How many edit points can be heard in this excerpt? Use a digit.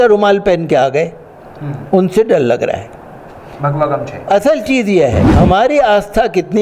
1